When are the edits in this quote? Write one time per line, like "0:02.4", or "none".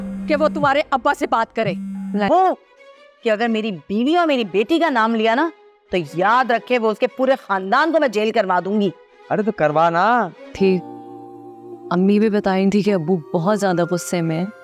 0:02.3
0:10.5